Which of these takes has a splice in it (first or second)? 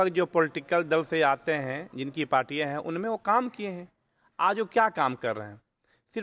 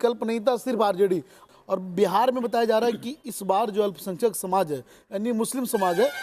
second